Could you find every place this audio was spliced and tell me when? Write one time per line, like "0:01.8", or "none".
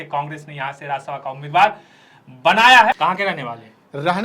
0:03.0